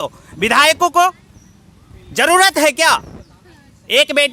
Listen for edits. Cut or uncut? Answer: uncut